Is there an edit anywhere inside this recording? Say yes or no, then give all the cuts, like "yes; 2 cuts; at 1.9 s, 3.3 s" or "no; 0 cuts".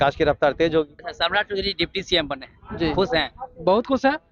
yes; 1 cut; at 1.0 s